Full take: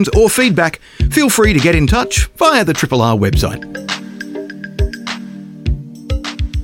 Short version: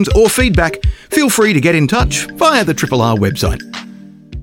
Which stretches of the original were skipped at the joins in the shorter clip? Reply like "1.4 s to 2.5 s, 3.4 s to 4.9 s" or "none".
3.5 s to 4.9 s